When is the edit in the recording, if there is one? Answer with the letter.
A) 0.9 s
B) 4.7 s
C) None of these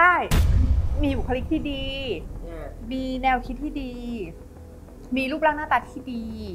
A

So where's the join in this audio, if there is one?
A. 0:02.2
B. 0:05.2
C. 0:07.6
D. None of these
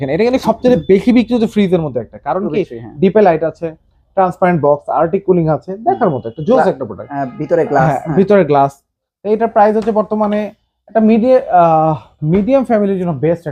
D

